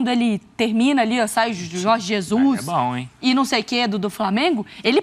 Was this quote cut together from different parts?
no; 0 cuts

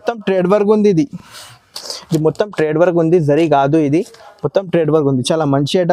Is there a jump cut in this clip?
no; 0 cuts

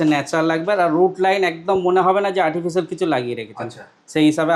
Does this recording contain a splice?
no; 0 cuts

